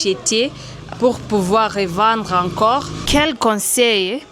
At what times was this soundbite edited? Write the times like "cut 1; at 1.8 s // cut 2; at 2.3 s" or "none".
cut 1; at 0.9 s // cut 2; at 3.0 s